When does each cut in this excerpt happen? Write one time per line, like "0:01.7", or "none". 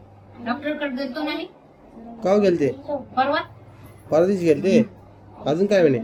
none